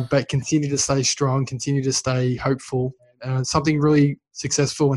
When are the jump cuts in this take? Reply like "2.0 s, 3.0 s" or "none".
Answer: 3.1 s